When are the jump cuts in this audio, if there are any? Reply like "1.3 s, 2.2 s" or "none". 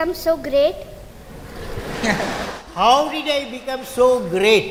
none